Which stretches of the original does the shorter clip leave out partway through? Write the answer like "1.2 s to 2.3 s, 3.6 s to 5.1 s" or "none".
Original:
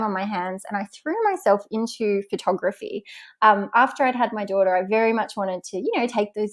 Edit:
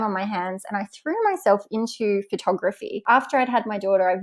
3.0 s to 3.7 s